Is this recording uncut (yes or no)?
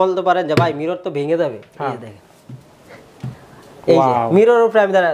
yes